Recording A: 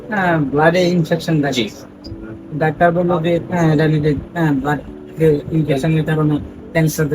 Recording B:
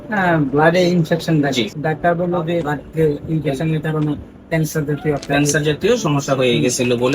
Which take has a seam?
B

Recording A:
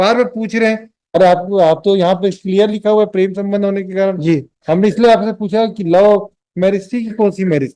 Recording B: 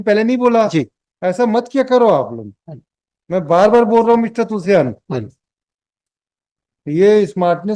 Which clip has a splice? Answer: A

